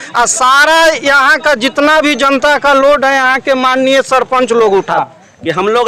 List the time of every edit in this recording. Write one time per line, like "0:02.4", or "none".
0:05.0